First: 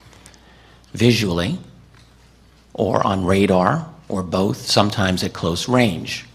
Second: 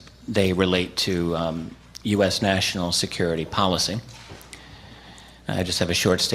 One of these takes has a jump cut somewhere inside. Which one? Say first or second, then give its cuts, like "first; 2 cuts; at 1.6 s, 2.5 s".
second; 1 cut; at 1.3 s